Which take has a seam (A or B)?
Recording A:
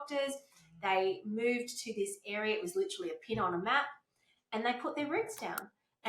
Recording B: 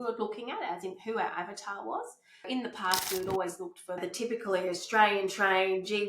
B